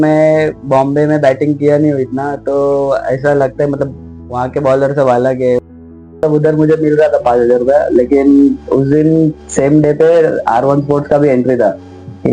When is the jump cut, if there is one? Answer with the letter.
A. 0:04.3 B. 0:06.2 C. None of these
B